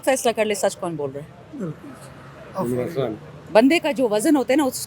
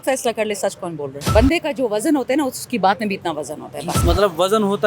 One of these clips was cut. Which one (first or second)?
second